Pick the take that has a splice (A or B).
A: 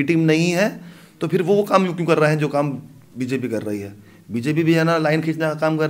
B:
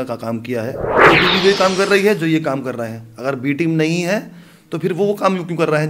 B